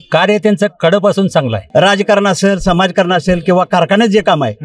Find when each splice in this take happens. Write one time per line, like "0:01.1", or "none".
0:01.6

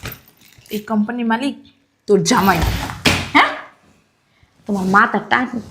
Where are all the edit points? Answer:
none

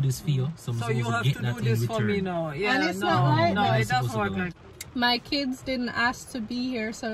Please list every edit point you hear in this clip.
0:04.6

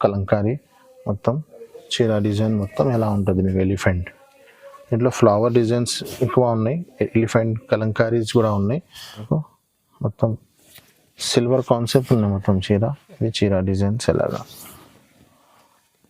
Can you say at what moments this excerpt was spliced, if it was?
0:09.2

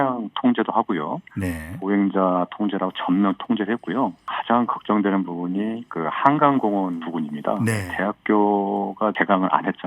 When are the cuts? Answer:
0:04.3
0:07.0
0:07.9
0:09.2

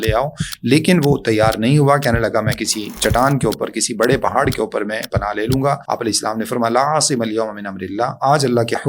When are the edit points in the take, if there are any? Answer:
0:05.8

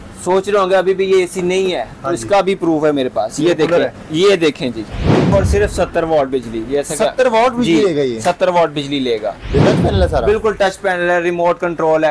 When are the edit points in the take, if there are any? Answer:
0:05.3
0:09.6

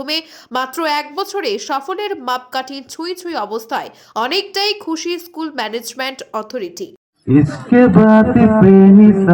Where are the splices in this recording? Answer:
0:06.9

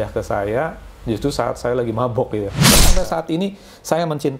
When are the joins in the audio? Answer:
0:02.9

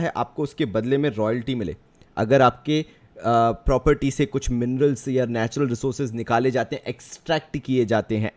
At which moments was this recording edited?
none

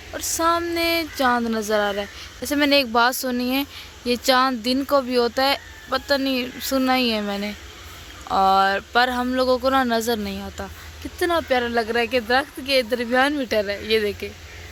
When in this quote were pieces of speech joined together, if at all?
none

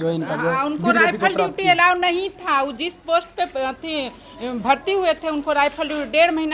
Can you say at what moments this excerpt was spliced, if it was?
none

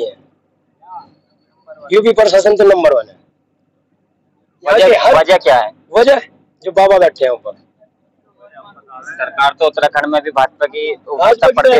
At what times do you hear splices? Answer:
none

